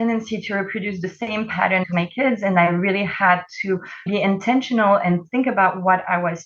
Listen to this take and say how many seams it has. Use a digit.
2